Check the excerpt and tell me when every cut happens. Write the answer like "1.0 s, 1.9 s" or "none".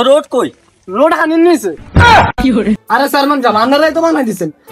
2.8 s